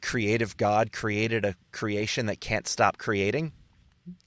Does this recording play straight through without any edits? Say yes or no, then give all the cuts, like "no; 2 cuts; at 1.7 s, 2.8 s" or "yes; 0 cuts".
yes; 0 cuts